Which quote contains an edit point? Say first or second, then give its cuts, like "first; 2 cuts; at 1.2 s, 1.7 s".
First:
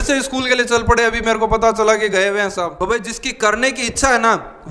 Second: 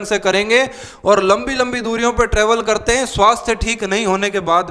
first; 1 cut; at 2.7 s